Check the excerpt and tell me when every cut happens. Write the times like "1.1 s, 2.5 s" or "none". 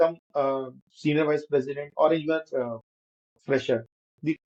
none